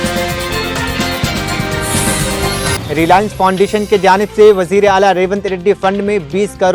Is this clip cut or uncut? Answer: cut